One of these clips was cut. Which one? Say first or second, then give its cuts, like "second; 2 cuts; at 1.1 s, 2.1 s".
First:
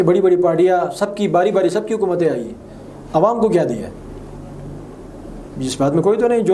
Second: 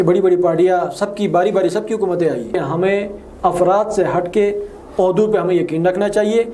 second; 1 cut; at 2.5 s